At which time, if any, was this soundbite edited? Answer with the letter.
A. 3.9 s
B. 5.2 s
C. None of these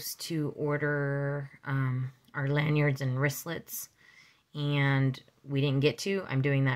C